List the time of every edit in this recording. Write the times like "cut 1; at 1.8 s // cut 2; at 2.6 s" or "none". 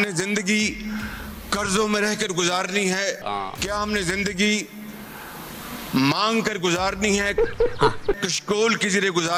none